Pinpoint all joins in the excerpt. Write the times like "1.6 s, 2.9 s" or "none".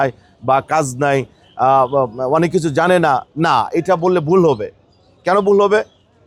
none